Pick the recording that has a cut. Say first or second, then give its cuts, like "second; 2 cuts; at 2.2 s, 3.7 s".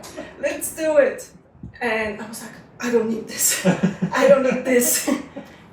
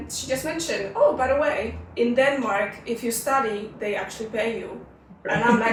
first; 1 cut; at 1.3 s